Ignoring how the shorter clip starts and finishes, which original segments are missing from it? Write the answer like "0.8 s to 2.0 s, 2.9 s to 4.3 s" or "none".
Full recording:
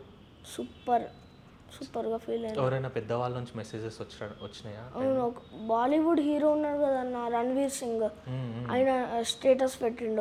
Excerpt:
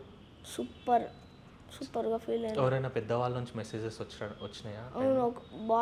none